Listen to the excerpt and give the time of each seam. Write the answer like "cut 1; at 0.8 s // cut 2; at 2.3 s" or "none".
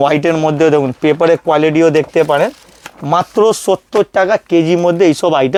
none